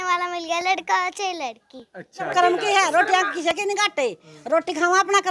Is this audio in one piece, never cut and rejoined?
no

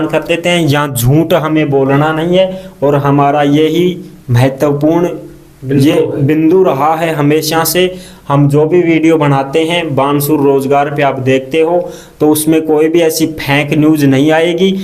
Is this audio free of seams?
yes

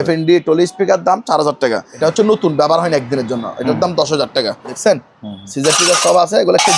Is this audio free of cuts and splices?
no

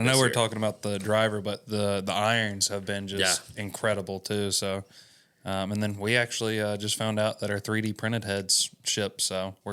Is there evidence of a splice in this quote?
no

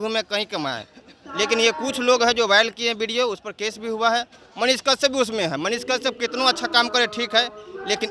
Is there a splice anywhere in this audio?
no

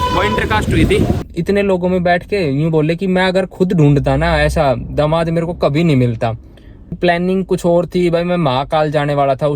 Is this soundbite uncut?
no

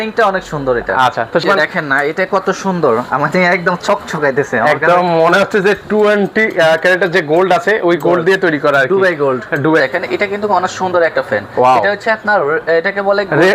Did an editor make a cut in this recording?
yes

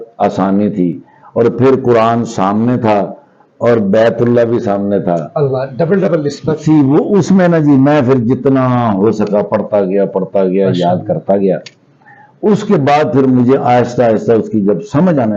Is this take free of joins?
yes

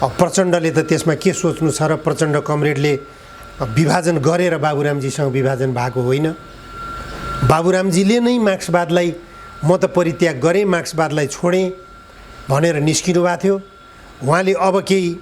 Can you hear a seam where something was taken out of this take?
no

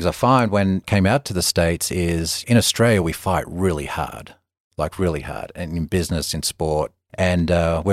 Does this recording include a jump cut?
yes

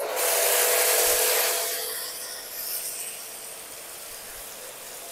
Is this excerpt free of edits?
yes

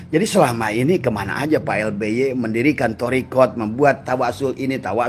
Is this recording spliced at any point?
no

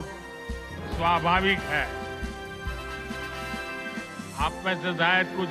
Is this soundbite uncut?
yes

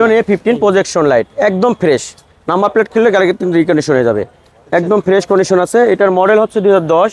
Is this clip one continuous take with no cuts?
yes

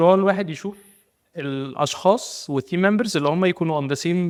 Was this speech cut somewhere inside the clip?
no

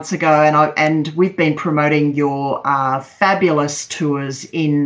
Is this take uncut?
yes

